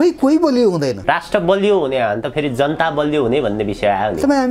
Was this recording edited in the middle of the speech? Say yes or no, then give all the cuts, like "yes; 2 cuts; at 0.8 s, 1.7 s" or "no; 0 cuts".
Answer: yes; 1 cut; at 1.0 s